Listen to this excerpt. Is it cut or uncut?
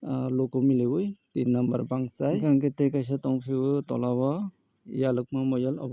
cut